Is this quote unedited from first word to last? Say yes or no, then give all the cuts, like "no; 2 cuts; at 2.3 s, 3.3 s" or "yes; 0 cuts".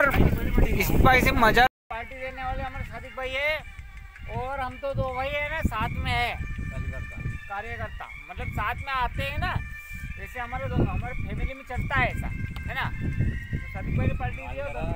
no; 1 cut; at 1.7 s